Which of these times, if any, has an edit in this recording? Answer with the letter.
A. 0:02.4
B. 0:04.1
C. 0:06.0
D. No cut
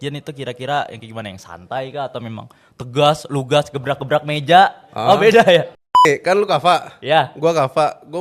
C